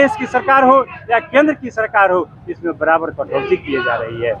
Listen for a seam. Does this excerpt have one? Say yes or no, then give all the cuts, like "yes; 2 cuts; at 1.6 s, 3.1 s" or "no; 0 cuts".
no; 0 cuts